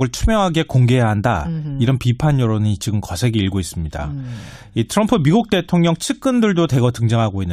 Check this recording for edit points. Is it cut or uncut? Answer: cut